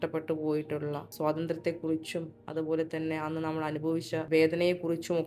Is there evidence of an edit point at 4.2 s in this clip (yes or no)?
yes